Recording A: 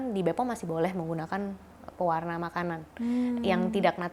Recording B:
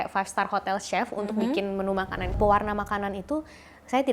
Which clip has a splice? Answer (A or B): B